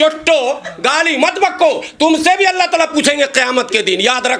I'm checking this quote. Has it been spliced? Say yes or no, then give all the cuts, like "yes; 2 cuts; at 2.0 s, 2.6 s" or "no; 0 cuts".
no; 0 cuts